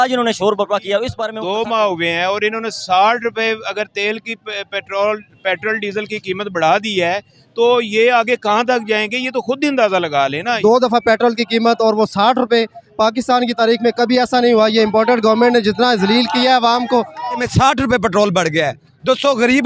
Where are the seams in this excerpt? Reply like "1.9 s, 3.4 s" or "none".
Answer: 1.2 s, 10.6 s, 17.4 s